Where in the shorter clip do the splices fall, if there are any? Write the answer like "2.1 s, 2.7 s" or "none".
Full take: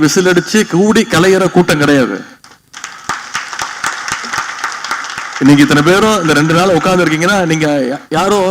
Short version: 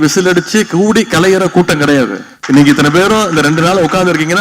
2.3 s